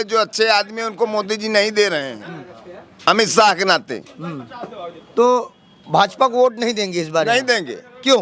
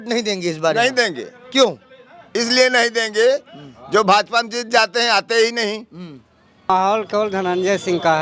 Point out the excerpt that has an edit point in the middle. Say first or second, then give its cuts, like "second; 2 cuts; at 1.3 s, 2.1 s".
second; 1 cut; at 6.7 s